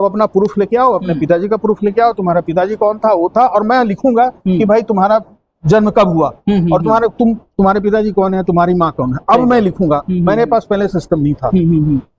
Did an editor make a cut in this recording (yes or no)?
no